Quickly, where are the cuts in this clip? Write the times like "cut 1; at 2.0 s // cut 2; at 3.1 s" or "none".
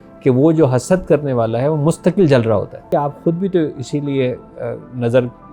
cut 1; at 2.9 s